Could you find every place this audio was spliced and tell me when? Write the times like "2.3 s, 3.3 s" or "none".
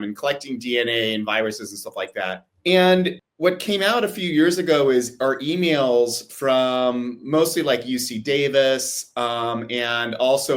2.5 s, 3.2 s